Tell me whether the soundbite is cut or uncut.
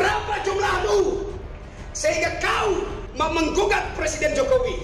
uncut